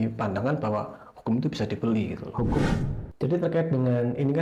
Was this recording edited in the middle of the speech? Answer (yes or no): yes